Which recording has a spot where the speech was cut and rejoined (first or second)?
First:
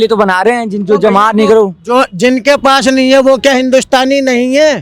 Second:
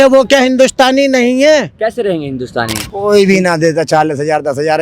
second